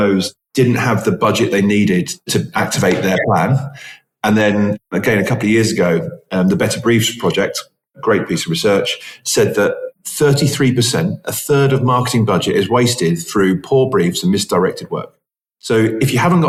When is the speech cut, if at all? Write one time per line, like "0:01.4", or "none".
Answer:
none